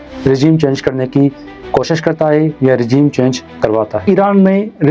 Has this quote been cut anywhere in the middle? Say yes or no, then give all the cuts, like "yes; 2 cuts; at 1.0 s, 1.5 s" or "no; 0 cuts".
yes; 1 cut; at 4.0 s